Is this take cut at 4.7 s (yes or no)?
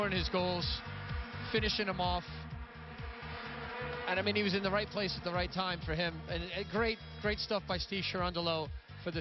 no